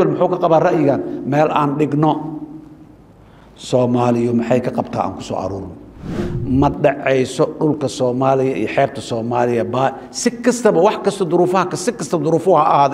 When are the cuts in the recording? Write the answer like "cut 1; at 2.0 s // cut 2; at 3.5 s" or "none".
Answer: cut 1; at 6.3 s

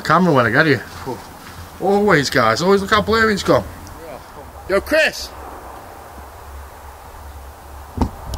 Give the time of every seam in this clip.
cut 1; at 4.4 s

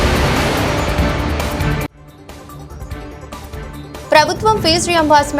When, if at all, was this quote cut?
cut 1; at 3.6 s

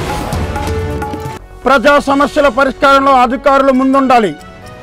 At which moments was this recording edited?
cut 1; at 1.3 s

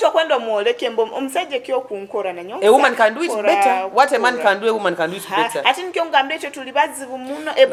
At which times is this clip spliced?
none

